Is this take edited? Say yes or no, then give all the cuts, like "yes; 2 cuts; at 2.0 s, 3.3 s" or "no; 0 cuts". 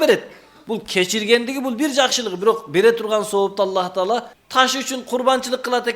yes; 1 cut; at 4.4 s